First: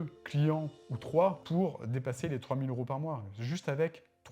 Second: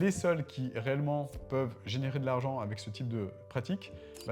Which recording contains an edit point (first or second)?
first